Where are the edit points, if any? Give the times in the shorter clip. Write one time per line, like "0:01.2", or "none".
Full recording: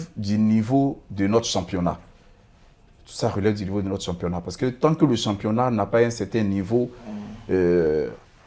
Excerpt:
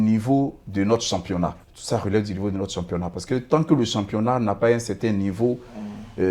0:01.7